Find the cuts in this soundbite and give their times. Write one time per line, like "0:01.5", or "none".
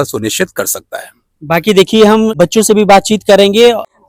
none